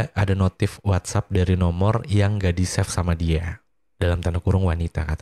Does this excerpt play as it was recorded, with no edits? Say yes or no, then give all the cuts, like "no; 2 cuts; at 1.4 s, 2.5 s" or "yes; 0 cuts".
yes; 0 cuts